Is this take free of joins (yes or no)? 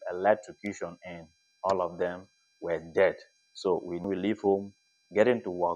no